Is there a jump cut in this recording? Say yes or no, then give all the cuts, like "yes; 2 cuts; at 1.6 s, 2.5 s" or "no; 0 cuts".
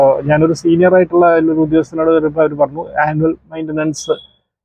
no; 0 cuts